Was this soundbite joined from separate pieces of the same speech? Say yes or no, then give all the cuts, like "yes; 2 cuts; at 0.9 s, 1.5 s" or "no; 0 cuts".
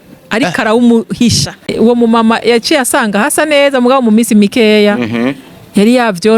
yes; 1 cut; at 1.7 s